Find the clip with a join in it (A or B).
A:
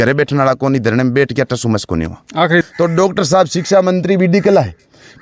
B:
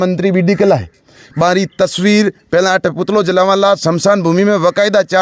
A